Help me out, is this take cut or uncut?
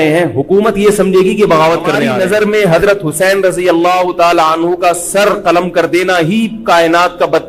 cut